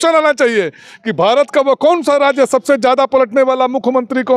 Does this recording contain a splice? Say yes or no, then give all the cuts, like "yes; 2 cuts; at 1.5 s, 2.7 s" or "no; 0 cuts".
no; 0 cuts